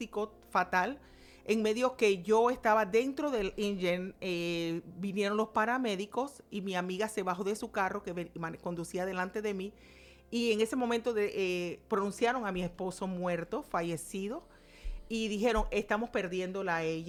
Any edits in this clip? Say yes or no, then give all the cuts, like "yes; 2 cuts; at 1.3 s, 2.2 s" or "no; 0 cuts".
no; 0 cuts